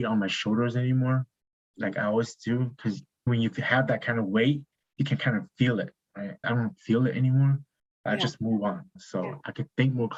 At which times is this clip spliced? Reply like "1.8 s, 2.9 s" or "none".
none